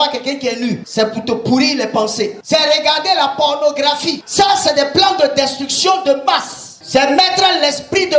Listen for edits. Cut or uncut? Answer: cut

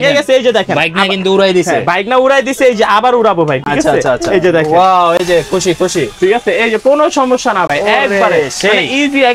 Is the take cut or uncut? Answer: uncut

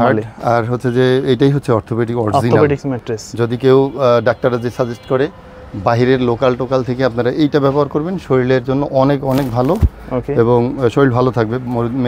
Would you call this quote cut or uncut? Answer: uncut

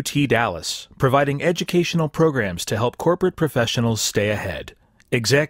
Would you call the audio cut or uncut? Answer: uncut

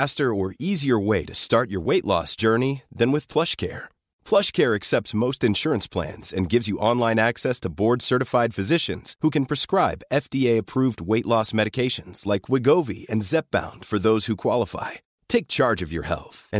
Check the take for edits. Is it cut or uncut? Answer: uncut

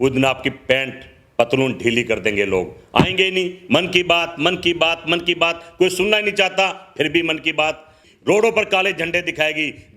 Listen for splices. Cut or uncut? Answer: cut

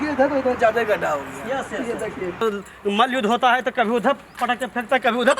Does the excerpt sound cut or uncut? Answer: cut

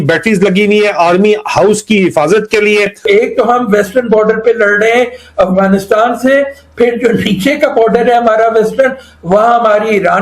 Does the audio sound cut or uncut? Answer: cut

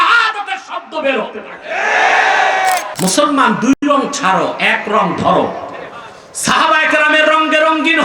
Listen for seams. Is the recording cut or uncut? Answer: cut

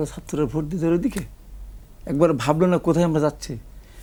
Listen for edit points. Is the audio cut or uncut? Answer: uncut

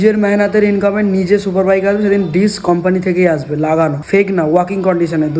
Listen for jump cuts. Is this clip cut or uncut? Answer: uncut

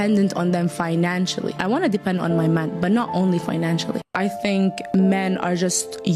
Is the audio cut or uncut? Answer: cut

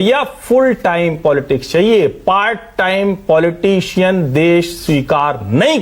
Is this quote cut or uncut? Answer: uncut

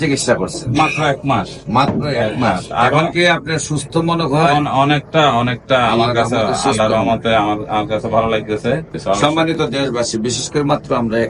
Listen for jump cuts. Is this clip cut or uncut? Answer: cut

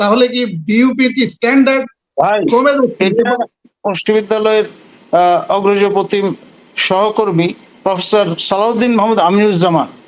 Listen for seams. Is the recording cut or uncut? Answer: cut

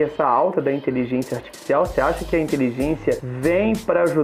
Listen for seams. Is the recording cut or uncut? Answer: cut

